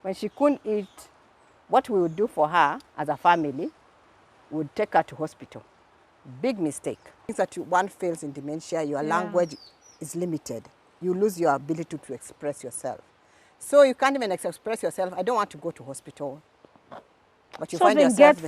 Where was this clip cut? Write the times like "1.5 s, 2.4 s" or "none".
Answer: 7.3 s